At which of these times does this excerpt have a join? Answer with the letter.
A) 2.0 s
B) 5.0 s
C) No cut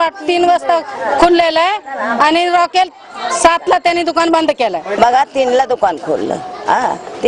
B